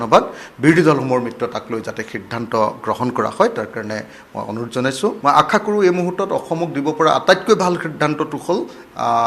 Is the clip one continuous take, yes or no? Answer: no